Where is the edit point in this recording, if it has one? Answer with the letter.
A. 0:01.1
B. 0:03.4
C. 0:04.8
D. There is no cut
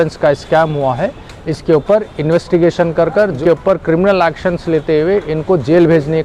B